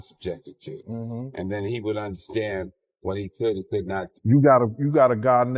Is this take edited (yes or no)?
yes